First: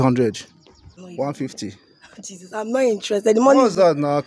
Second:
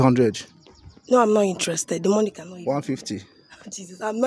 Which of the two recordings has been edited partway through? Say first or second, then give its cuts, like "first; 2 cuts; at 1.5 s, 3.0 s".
first; 1 cut; at 0.9 s